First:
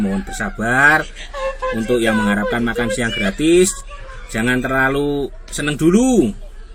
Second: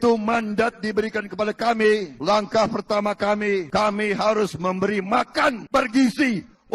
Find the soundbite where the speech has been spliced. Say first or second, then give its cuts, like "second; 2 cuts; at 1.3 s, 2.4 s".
second; 3 cuts; at 2.1 s, 3.7 s, 5.6 s